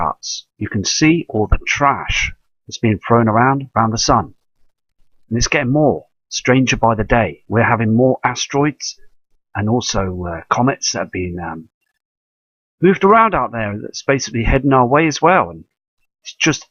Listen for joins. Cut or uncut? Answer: uncut